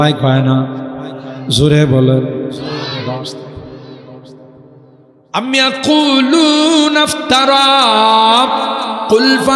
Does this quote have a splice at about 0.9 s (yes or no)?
no